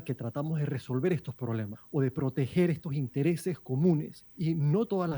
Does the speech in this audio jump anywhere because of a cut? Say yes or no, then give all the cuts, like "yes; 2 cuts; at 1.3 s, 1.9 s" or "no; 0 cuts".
yes; 2 cuts; at 1.8 s, 4.2 s